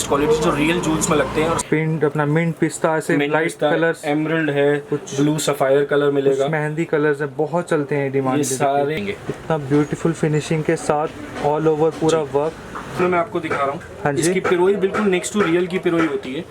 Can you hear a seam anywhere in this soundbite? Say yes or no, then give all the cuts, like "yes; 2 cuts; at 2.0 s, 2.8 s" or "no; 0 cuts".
yes; 3 cuts; at 1.6 s, 9.0 s, 13.0 s